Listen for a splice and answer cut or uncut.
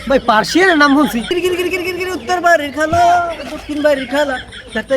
cut